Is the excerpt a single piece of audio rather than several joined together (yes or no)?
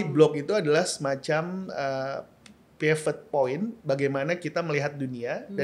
yes